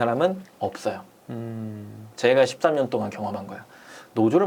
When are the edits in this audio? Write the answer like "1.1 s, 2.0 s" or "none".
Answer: none